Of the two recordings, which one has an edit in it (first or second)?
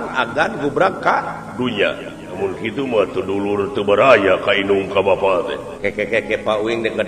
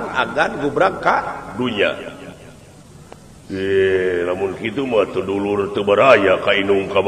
first